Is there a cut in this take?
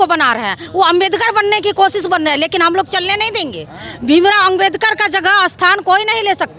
no; 0 cuts

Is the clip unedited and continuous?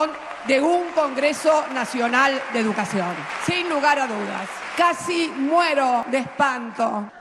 yes; 0 cuts

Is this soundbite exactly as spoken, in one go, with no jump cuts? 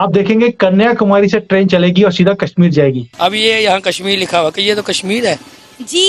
no; 1 cut; at 3.1 s

